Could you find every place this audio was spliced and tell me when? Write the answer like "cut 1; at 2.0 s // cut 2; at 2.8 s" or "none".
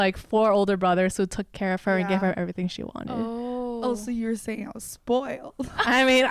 none